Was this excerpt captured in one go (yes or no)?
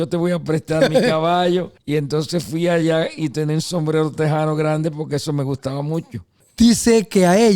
no